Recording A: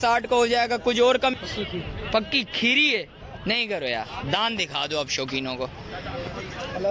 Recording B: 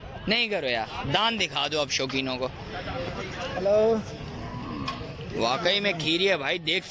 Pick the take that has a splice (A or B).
A